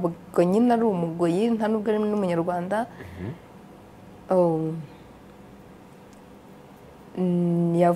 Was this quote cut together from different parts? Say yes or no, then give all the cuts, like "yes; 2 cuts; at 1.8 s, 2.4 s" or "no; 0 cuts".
no; 0 cuts